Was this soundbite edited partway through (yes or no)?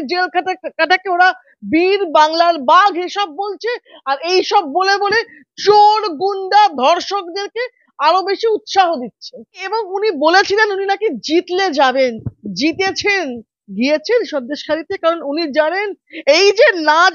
yes